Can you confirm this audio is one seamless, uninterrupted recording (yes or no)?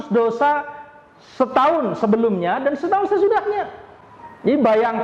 yes